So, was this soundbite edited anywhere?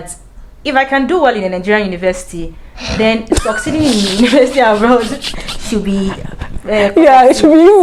no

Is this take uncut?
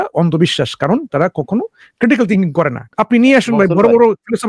no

